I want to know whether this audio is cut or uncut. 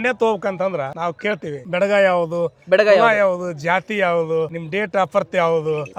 uncut